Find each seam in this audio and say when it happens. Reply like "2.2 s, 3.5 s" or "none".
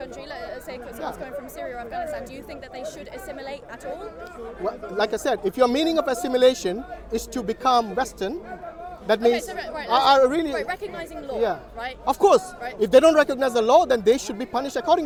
none